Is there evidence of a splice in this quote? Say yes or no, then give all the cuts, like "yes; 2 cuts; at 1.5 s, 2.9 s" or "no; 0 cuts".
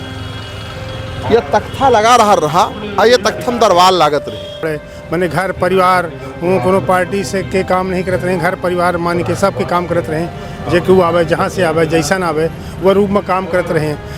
yes; 1 cut; at 4.7 s